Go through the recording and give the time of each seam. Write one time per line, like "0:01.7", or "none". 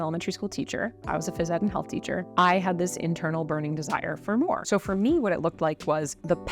0:04.6